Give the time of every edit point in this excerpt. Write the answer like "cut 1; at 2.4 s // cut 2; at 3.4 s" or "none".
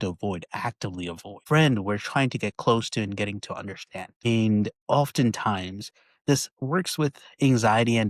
cut 1; at 1.3 s